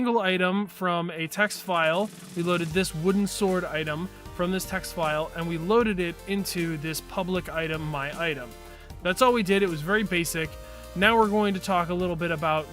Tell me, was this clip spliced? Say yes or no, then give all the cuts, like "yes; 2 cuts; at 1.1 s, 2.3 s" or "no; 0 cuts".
yes; 1 cut; at 9.8 s